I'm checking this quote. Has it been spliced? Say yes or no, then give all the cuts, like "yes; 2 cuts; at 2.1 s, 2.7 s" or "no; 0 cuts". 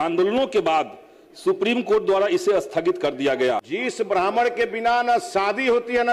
yes; 1 cut; at 3.7 s